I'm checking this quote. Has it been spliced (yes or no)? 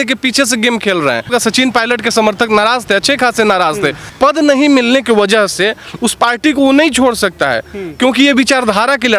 yes